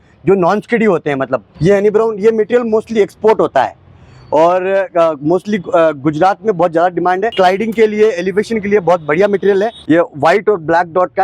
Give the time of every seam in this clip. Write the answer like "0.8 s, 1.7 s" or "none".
1.5 s, 7.3 s, 9.8 s